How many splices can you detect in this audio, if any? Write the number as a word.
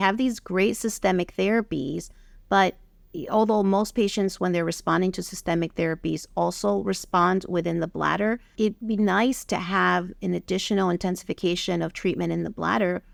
zero